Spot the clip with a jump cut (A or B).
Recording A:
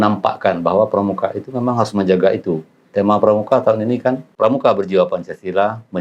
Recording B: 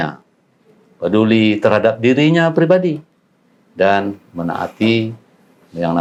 A